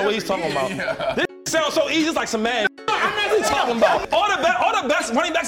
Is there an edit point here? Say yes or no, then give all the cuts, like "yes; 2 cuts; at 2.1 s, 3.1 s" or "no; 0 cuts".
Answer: yes; 1 cut; at 4.0 s